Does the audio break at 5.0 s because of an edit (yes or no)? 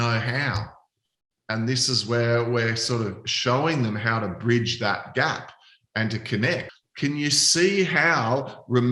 no